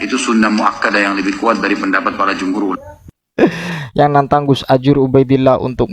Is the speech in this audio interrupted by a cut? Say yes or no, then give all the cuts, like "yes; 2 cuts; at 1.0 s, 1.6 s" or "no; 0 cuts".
yes; 1 cut; at 2.9 s